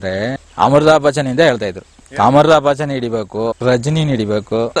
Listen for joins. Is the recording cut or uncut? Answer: cut